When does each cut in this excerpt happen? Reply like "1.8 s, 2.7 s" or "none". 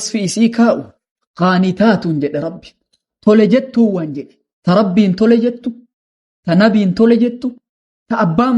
1.0 s